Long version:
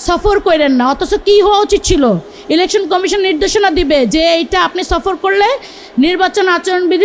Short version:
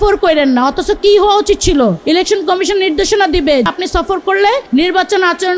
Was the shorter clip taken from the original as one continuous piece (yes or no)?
no